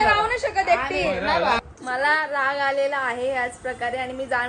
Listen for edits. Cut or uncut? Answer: cut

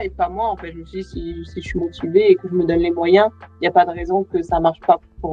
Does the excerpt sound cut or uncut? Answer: uncut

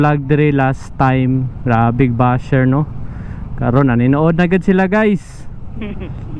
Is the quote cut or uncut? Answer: uncut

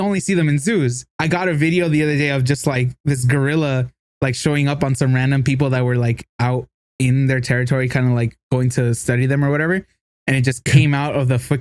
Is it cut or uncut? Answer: cut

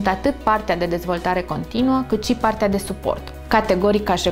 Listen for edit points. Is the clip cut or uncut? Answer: cut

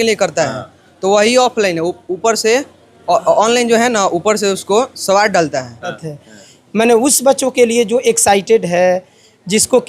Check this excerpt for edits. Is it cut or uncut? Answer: cut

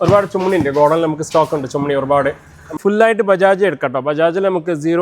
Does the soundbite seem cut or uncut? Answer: cut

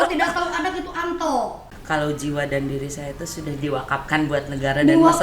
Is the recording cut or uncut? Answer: cut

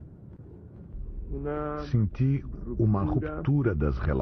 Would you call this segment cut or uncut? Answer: cut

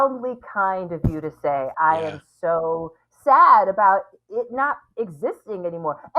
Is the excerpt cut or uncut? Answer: cut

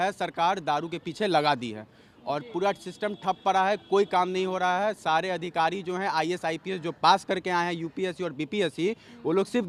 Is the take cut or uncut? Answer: uncut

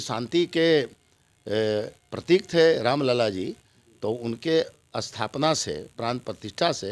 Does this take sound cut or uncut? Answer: uncut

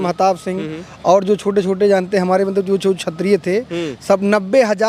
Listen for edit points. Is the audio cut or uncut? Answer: uncut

